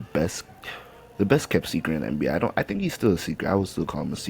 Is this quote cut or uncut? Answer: uncut